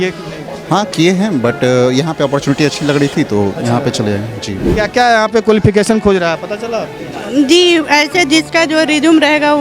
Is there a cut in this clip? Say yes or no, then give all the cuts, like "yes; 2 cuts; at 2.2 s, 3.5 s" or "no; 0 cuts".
yes; 1 cut; at 4.6 s